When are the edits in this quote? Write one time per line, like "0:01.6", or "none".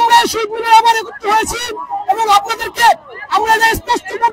none